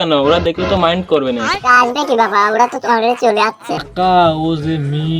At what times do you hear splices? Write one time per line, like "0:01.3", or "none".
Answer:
0:03.8